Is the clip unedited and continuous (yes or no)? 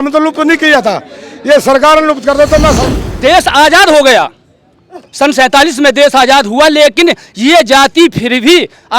no